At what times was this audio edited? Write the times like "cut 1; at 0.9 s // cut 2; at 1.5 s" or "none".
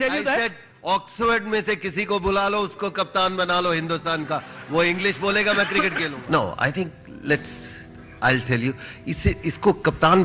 cut 1; at 6.1 s